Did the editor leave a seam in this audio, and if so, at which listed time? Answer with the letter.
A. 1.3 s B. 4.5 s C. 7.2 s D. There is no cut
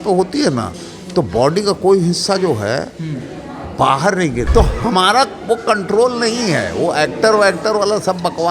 B